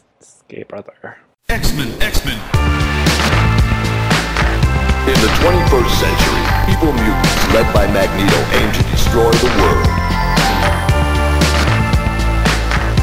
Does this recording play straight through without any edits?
no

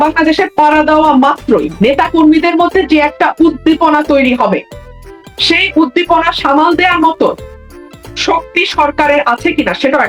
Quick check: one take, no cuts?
yes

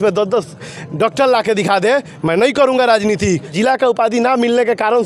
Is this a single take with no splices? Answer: no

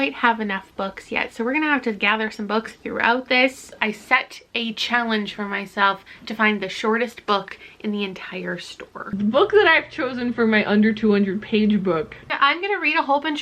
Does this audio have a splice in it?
yes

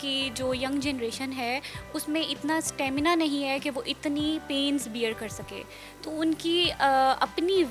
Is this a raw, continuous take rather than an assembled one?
yes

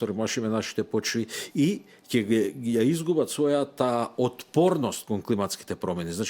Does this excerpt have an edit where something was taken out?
no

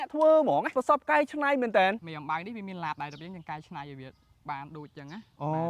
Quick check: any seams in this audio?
yes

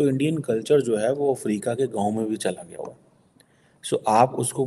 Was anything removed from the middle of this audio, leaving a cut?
no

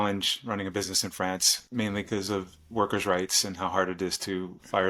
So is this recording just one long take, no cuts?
yes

